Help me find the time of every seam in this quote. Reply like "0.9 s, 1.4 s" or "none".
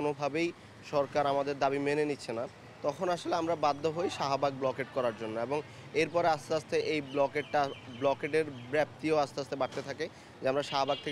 none